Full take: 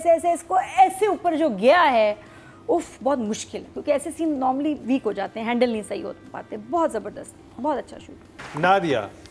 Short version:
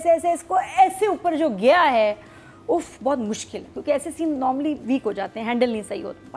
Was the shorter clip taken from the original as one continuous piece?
yes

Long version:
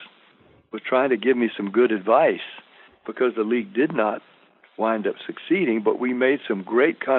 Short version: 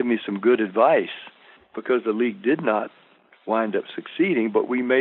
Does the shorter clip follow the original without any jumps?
yes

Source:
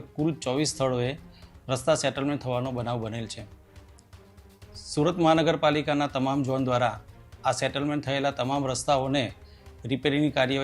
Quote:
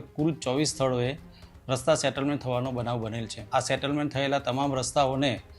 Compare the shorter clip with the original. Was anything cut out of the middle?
yes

